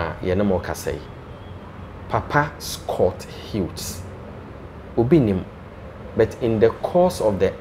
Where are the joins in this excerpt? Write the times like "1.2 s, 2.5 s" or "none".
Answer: none